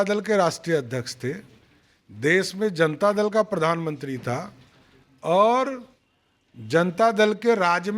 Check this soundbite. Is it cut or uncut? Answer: uncut